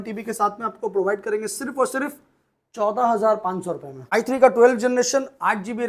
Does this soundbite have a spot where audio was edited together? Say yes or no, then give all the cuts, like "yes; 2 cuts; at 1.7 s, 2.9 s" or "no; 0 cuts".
yes; 1 cut; at 3.9 s